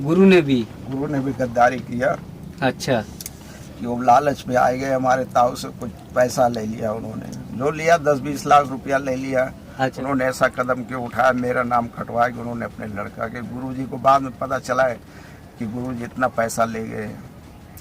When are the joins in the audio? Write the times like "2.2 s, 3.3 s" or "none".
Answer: 10.0 s